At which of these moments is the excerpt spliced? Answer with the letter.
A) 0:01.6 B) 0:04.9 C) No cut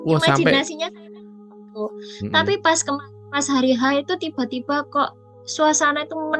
A